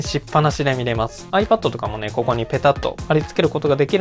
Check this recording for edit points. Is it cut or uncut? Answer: cut